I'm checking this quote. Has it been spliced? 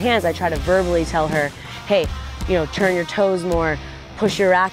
no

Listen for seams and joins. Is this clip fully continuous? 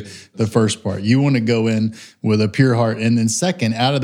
yes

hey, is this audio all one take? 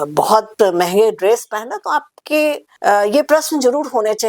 no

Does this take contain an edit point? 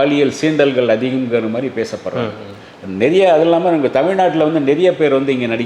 no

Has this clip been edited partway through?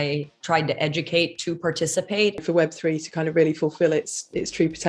yes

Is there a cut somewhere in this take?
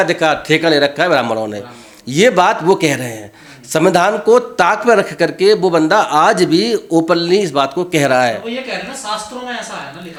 no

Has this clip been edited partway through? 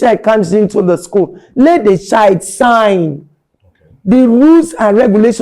no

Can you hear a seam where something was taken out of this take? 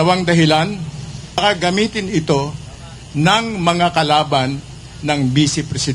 yes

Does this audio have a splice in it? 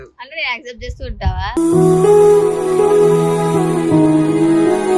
no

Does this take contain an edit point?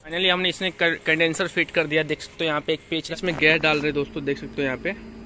yes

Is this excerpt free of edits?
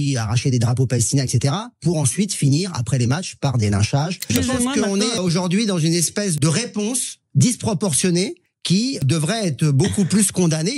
no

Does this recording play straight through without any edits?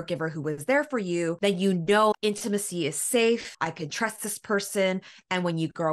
no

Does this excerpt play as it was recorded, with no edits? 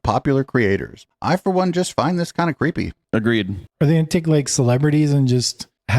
no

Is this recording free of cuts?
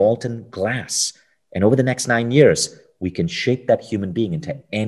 yes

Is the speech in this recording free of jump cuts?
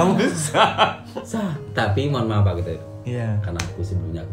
yes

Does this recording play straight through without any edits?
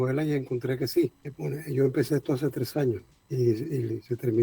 no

